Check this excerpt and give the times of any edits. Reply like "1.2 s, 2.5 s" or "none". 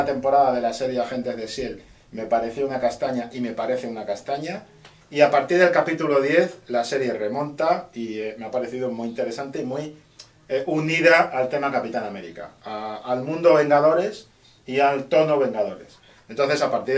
11.9 s